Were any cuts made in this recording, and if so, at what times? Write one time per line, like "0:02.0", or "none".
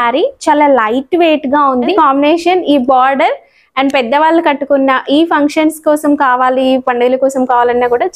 0:01.9